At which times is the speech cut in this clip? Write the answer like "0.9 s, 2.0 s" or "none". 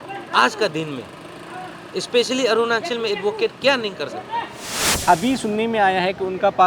4.8 s

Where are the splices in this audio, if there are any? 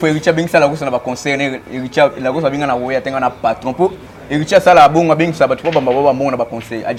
none

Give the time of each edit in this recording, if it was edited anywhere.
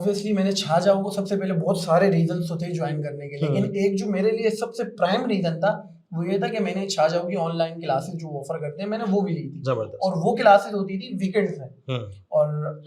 none

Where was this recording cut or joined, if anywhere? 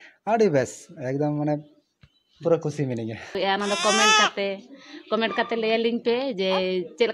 3.3 s

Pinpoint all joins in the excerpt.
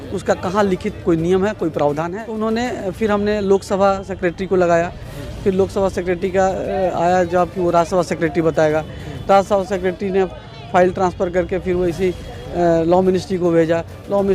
2.1 s

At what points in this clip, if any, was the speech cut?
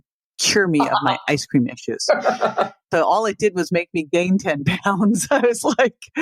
2.8 s

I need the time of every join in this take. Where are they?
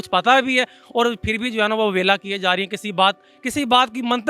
none

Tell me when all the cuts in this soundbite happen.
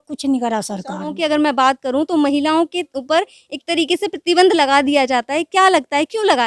1.2 s

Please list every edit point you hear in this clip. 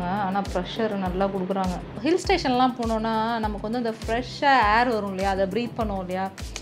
1.9 s

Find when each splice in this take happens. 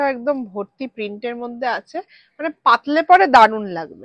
none

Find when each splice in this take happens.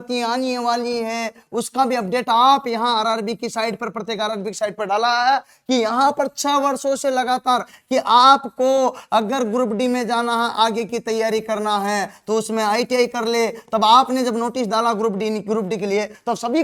none

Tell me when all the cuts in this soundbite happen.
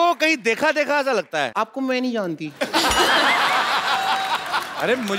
1.5 s

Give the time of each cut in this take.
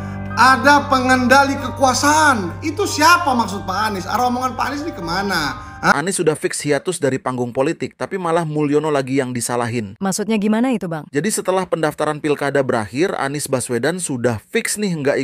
5.9 s

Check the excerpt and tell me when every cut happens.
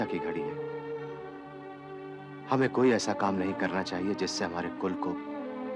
none

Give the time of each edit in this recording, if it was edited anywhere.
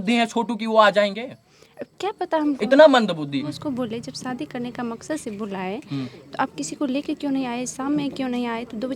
3.4 s

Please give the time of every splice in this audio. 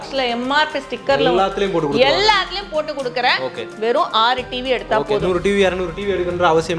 none

